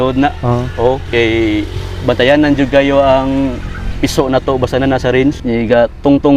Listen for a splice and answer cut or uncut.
uncut